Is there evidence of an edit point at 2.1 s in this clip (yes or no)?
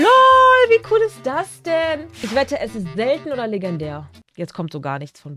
yes